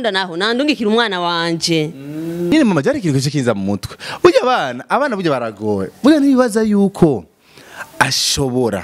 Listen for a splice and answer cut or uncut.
cut